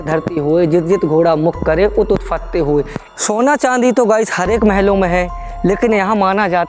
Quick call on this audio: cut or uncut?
cut